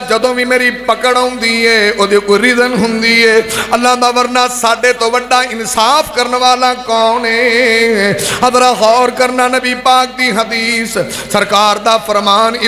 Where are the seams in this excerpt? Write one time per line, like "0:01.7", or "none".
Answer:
none